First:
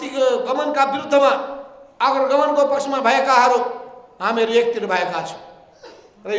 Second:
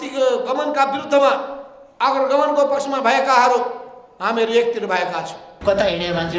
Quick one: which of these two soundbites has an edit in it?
second; 1 cut; at 5.4 s

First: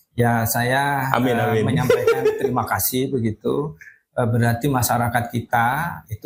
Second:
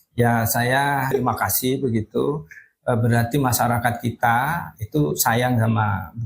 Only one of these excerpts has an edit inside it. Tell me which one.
second; 1 cut; at 1.1 s

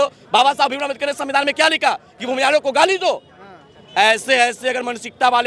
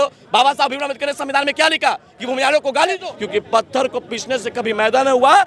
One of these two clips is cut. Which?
second; 1 cut; at 3.1 s

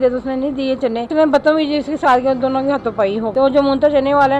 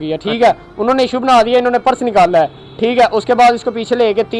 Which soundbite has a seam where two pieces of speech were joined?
first; 2 cuts; at 1.1 s, 3.3 s

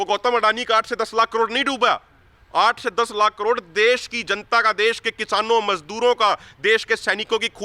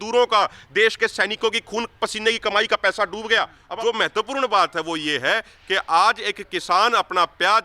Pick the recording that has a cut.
second; 1 cut; at 3.6 s

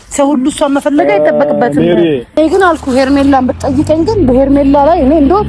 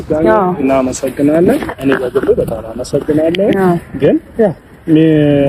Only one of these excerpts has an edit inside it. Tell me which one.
first; 1 cut; at 2.4 s

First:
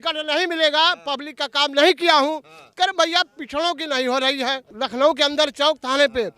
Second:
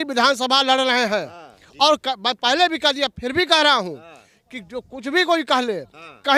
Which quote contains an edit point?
first; 1 cut; at 4.7 s

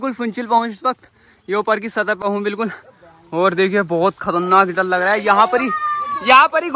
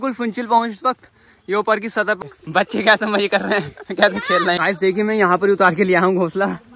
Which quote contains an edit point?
second; 2 cuts; at 2.2 s, 4.6 s

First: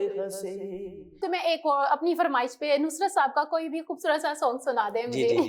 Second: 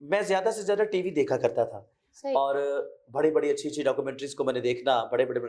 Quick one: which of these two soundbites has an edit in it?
first; 1 cut; at 1.2 s

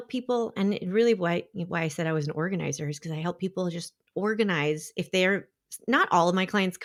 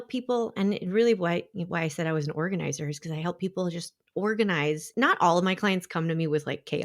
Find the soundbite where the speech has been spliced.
second; 1 cut; at 4.8 s

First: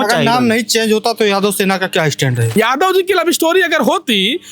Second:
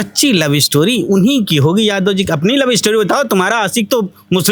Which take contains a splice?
first; 1 cut; at 2.5 s

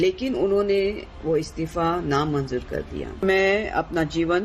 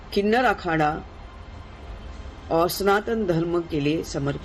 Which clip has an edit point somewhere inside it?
first; 1 cut; at 3.2 s

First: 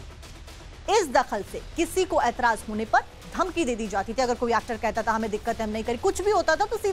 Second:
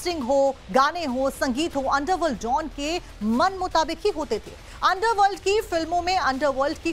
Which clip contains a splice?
first; 1 cut; at 4.9 s

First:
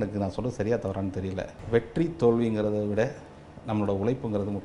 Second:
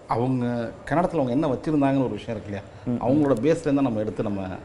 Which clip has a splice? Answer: first; 1 cut; at 1.5 s

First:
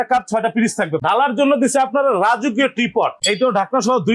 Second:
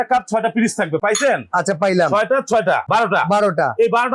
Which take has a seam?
first; 2 cuts; at 1.0 s, 3.2 s

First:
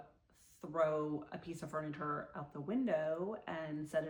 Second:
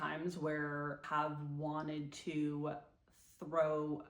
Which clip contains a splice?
second; 1 cut; at 1.0 s

